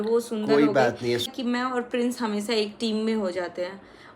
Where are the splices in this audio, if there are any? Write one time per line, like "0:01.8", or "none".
0:01.3